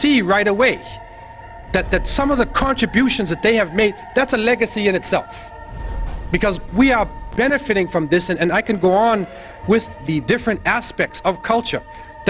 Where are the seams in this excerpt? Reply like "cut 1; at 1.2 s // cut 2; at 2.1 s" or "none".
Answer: cut 1; at 3.4 s